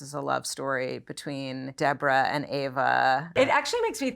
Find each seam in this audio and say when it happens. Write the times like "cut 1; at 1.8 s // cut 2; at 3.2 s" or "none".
cut 1; at 1.7 s // cut 2; at 3.3 s